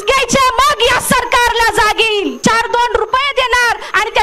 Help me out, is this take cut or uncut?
cut